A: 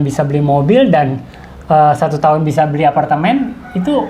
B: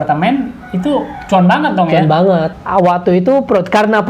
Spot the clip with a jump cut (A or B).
B